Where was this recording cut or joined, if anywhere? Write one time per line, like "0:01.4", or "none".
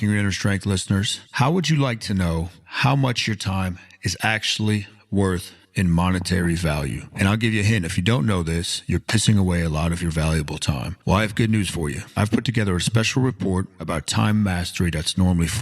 0:05.6